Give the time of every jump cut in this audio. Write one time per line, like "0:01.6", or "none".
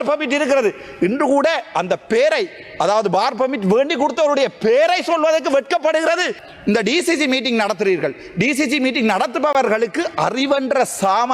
0:06.4